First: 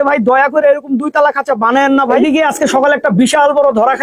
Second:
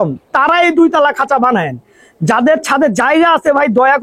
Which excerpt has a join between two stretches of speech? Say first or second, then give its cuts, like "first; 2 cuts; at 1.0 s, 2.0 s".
first; 1 cut; at 2.1 s